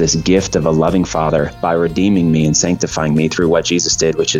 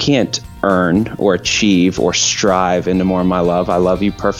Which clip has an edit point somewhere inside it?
first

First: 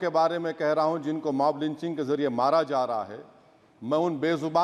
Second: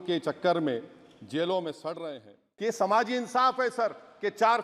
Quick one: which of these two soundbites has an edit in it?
second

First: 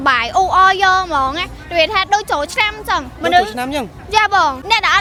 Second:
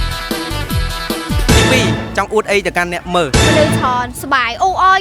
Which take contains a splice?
second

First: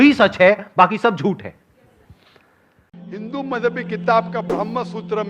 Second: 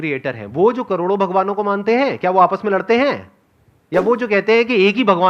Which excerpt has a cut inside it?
first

